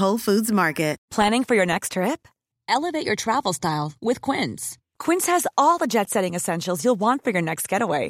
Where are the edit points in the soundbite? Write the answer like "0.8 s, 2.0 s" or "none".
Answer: 1.0 s